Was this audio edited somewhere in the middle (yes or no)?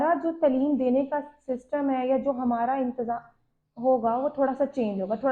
no